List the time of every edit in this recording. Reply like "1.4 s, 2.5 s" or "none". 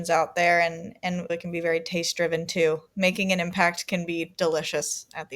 2.9 s